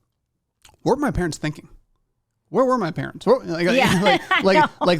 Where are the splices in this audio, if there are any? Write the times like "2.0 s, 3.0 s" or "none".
none